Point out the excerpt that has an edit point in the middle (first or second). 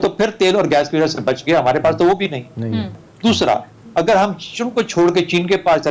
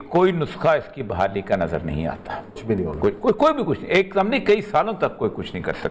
first